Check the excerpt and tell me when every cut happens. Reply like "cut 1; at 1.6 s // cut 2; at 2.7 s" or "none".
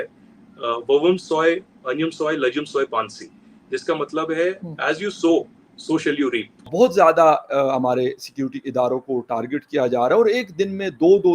cut 1; at 6.7 s